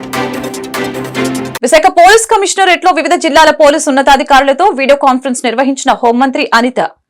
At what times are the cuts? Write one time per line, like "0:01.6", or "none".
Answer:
0:01.5